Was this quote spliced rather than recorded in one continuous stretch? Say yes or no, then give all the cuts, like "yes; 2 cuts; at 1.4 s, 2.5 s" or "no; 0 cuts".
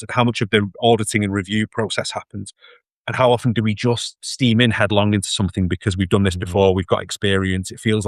no; 0 cuts